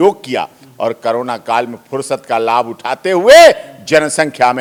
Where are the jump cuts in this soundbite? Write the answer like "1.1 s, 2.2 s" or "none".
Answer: none